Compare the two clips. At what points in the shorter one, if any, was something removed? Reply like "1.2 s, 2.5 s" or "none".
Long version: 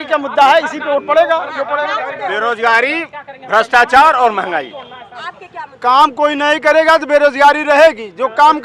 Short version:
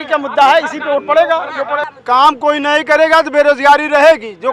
1.9 s